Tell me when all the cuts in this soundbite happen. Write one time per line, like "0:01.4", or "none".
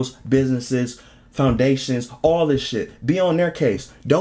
none